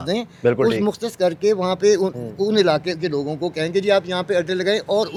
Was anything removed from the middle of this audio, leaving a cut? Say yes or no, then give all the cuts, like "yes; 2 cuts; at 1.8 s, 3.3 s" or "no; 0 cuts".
no; 0 cuts